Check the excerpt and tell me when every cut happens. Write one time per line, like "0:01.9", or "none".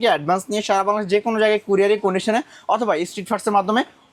none